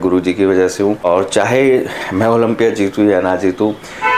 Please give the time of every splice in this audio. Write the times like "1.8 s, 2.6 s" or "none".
1.0 s